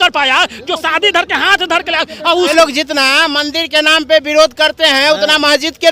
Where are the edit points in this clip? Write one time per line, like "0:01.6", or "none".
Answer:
0:02.5